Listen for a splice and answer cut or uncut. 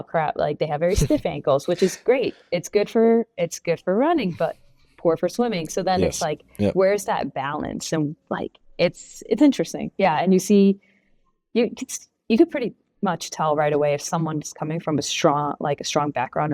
uncut